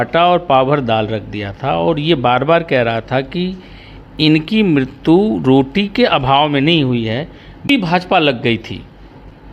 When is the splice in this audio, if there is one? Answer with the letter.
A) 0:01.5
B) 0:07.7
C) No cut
B